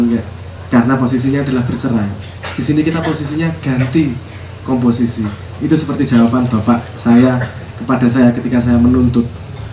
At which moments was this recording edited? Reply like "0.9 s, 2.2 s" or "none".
none